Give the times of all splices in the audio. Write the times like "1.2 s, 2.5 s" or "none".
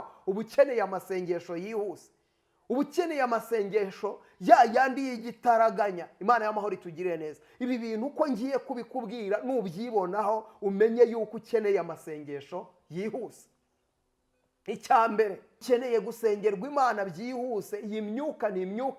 15.6 s